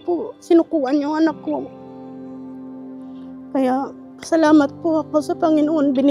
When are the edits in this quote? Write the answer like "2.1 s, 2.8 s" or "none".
none